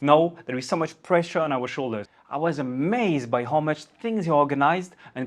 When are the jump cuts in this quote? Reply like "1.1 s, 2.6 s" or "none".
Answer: 2.0 s

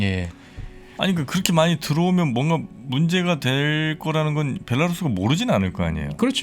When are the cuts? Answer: none

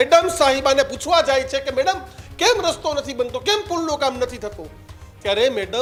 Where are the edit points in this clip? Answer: none

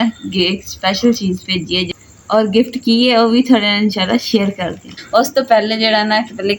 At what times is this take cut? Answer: 1.9 s, 4.9 s

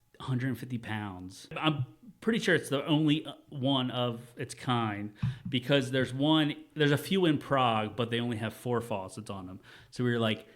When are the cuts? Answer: 1.6 s

